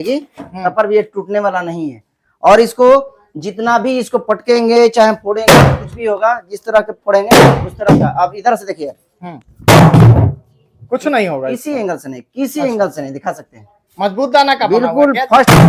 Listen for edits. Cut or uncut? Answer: uncut